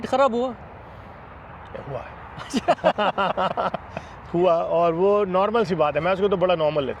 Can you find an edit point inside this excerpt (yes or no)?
no